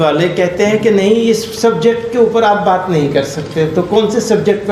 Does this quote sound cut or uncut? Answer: uncut